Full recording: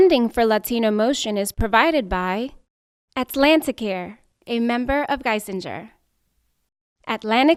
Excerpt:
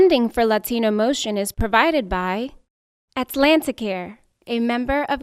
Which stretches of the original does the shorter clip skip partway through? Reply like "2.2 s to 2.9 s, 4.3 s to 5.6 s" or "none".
none